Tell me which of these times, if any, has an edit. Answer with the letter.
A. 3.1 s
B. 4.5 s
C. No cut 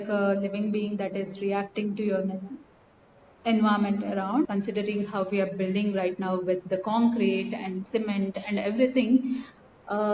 B